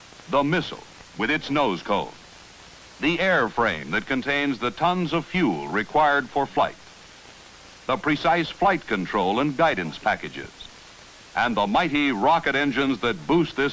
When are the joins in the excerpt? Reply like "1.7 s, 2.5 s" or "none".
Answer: 1.1 s